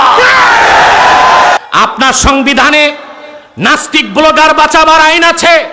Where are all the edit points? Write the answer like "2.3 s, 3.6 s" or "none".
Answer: 1.6 s